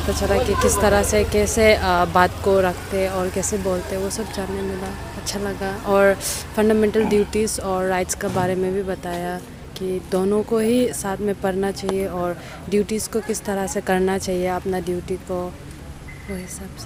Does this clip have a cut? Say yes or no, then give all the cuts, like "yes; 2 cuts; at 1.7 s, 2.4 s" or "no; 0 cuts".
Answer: no; 0 cuts